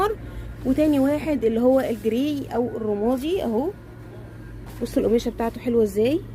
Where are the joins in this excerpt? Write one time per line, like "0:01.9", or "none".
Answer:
none